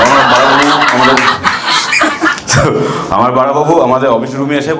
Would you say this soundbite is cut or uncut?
uncut